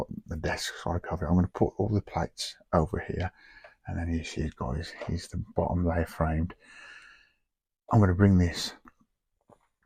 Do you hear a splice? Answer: no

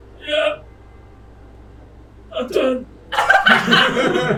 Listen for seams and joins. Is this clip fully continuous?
yes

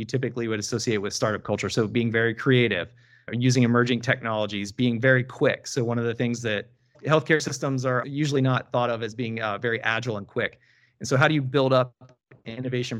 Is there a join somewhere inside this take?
no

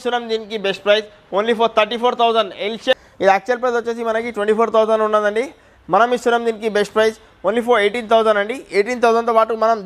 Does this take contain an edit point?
yes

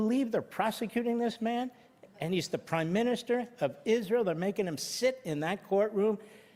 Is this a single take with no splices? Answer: yes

